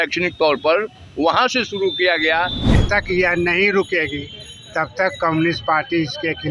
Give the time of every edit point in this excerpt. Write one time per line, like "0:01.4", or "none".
0:02.7